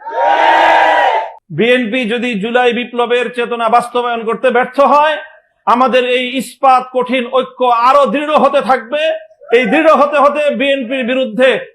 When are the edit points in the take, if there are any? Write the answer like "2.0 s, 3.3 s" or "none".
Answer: 1.4 s